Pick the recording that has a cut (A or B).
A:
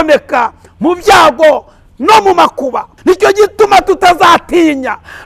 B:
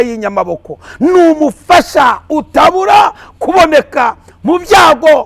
A